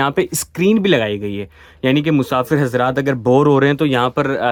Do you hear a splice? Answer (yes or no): no